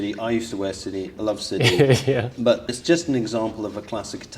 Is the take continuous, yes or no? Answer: no